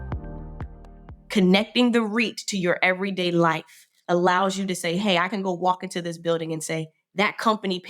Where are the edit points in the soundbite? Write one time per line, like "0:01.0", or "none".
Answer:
0:01.0